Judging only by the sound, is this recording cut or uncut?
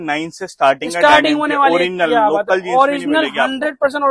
uncut